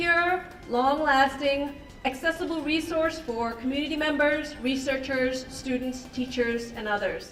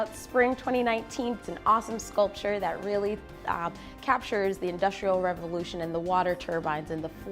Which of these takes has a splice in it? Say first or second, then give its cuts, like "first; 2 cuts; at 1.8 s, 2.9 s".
second; 1 cut; at 1.4 s